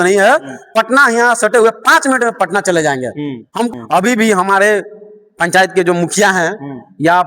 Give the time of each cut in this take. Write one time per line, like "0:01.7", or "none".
0:03.7